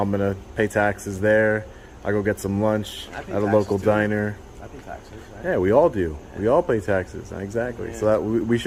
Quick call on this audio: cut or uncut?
uncut